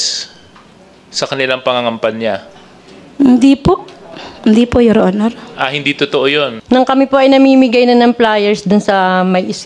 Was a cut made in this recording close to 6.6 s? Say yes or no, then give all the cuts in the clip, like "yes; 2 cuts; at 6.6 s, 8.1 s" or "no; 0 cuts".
yes; 1 cut; at 6.6 s